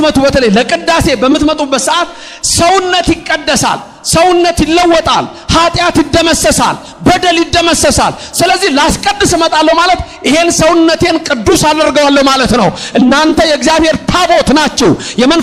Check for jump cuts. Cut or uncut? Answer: uncut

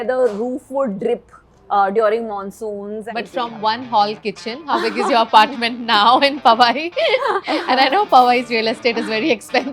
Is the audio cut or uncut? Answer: cut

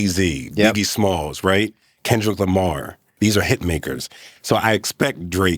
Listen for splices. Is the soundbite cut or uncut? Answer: cut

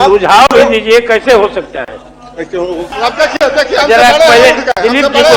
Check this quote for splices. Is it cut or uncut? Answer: cut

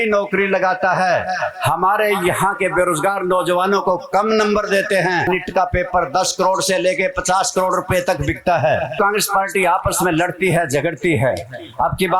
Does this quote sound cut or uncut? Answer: cut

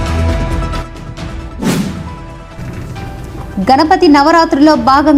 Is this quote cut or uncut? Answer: uncut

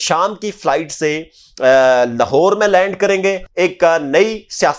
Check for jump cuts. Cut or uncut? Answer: cut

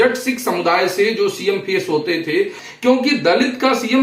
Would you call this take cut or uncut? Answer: cut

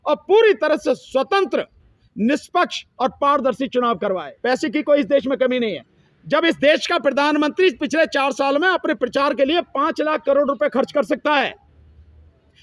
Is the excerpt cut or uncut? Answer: cut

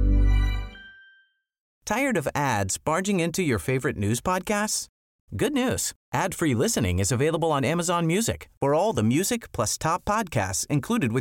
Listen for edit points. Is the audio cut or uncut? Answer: uncut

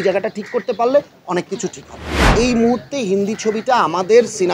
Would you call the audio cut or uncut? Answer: cut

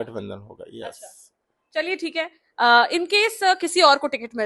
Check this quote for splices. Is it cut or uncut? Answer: uncut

